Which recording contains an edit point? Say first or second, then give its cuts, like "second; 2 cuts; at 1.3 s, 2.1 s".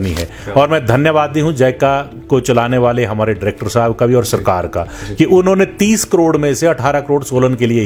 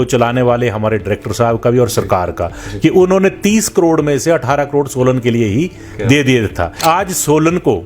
second; 1 cut; at 6.8 s